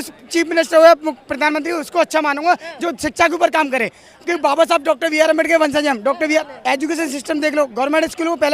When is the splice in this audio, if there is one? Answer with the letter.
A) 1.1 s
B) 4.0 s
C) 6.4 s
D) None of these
C